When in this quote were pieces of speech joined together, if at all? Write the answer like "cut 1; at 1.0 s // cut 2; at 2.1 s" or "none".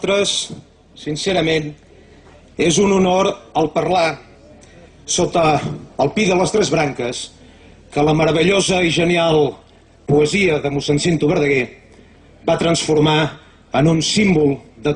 cut 1; at 5.2 s